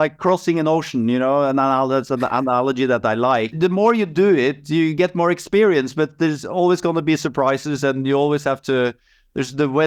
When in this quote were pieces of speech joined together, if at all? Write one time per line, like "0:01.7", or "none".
none